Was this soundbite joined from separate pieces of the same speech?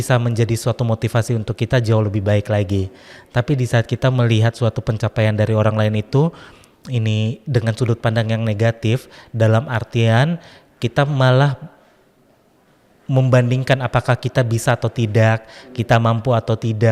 no; 0 cuts

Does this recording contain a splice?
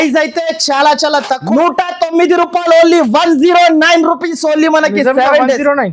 yes; 1 cut; at 1.4 s

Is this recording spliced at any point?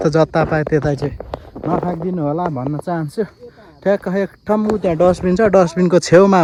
no; 0 cuts

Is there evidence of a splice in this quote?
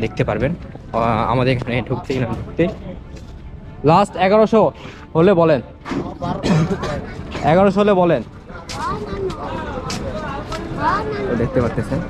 no; 0 cuts

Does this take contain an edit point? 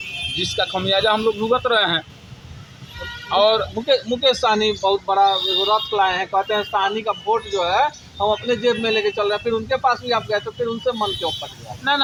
no; 0 cuts

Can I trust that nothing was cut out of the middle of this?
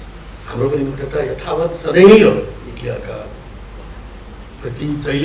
yes; 0 cuts

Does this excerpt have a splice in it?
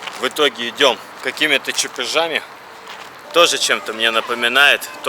yes; 1 cut; at 3.2 s

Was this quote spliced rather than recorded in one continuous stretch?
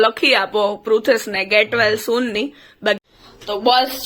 yes; 1 cut; at 3.0 s

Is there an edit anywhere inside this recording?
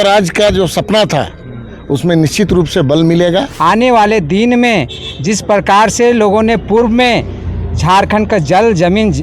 yes; 1 cut; at 3.5 s

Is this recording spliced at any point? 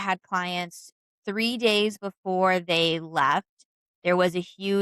no; 0 cuts

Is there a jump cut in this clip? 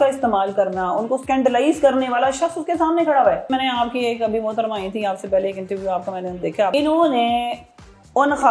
yes; 3 cuts; at 1.2 s, 3.5 s, 6.7 s

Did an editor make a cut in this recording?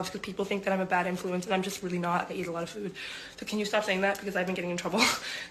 no; 0 cuts

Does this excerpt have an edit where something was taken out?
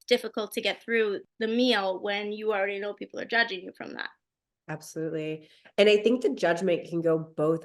yes; 1 cut; at 1.3 s

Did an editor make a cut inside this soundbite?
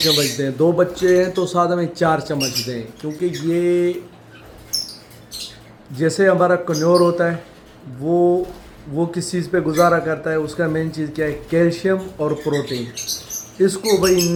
no; 0 cuts

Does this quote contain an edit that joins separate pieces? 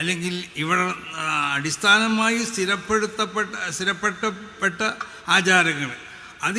no; 0 cuts

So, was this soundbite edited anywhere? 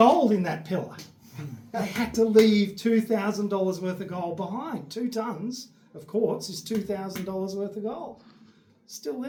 no; 0 cuts

